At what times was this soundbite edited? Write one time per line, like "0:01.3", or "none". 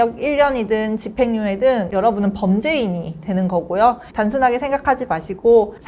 0:04.1